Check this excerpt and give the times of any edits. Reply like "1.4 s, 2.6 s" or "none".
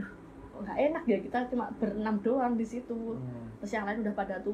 none

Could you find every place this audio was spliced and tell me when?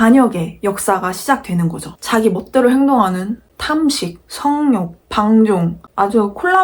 1.9 s

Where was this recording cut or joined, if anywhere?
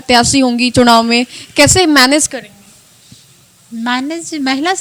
none

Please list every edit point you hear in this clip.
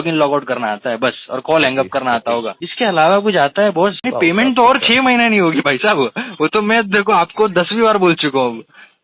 2.6 s, 4.0 s

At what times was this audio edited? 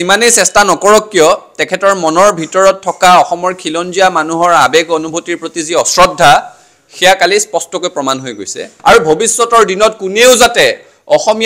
8.7 s

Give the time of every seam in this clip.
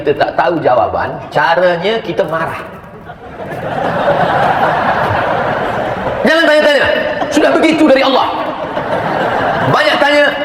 none

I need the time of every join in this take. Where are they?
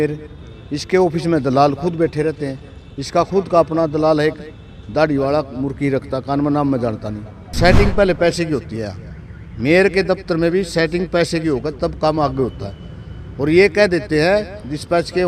7.6 s

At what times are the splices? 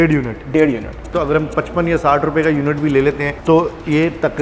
1.1 s, 3.3 s

